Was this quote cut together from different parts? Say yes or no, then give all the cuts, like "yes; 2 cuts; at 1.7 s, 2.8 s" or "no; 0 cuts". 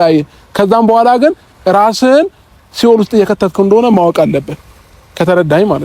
no; 0 cuts